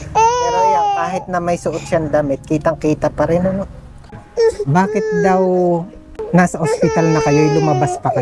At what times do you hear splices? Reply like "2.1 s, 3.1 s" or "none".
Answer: 4.2 s, 6.2 s